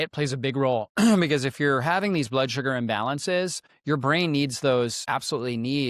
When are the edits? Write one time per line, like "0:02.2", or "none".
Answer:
none